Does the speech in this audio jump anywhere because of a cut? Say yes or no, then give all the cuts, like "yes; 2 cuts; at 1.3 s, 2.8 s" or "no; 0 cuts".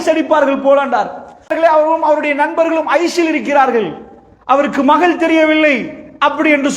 yes; 1 cut; at 1.5 s